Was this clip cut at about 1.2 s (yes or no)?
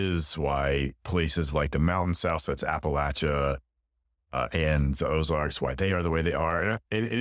no